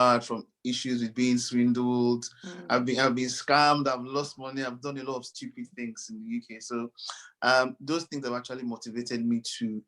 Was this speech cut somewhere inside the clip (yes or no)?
no